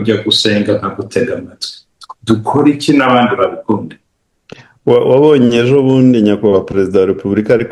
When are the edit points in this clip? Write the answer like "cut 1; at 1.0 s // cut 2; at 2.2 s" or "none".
none